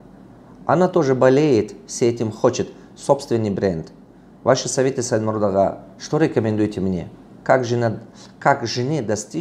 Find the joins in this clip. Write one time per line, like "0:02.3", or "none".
none

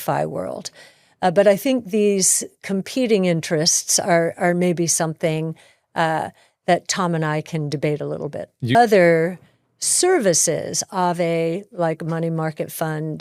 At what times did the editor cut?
0:08.8

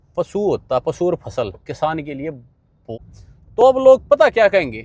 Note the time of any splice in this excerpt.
0:03.0

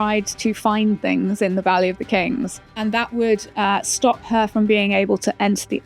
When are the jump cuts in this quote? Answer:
0:02.6

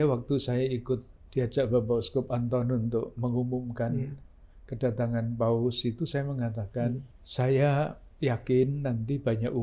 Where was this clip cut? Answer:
0:01.2
0:07.2
0:08.0

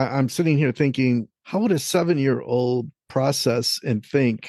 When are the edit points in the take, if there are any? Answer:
0:01.4

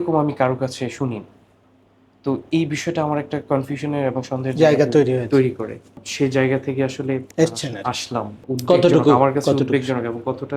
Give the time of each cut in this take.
0:06.0
0:07.3
0:08.4

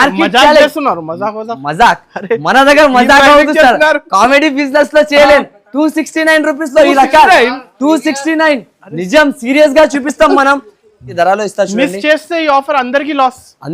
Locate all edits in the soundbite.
0:11.1

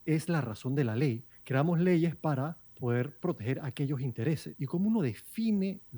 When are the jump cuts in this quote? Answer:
0:01.3
0:02.6
0:04.5

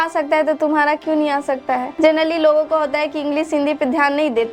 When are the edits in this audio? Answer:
0:01.9

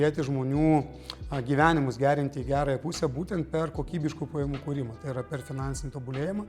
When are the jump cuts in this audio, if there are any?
none

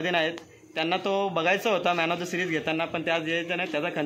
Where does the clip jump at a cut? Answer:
none

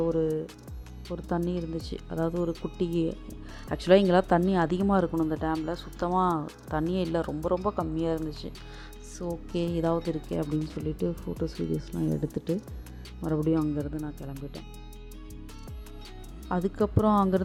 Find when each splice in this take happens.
none

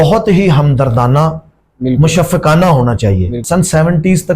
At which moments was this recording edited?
0:03.4

